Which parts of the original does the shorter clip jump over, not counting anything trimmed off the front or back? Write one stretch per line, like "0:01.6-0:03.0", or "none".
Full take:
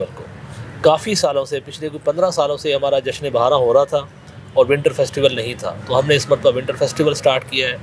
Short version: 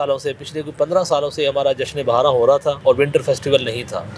0:04.0-0:04.5

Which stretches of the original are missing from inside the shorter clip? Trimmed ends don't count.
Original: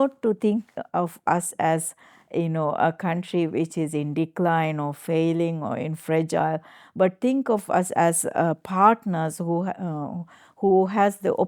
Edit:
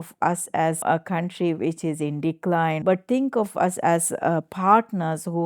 0:01.9-0:02.7
0:04.7-0:06.9

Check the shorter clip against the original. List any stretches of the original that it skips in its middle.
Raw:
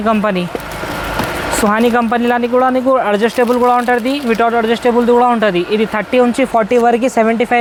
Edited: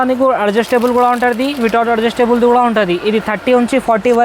none

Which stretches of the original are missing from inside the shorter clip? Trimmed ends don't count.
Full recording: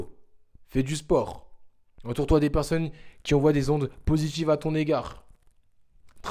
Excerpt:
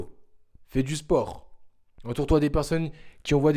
none

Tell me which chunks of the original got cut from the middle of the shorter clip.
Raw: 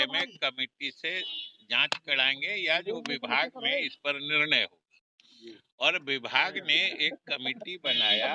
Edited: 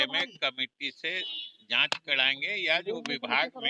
none

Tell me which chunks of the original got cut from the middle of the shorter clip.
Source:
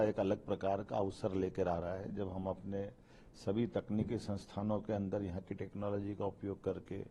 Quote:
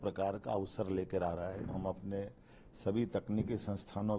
0:02.1-0:02.3

